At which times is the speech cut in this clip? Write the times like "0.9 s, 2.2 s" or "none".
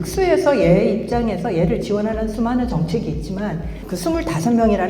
3.9 s